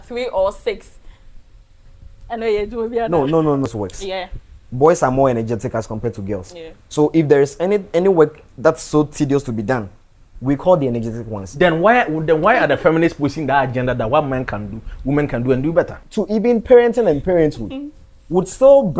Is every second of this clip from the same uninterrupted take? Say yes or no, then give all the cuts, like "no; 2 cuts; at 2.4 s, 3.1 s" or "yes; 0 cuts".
no; 2 cuts; at 3.7 s, 16.0 s